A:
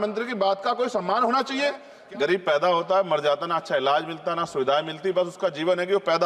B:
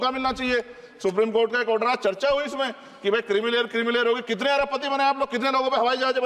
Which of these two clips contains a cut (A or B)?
A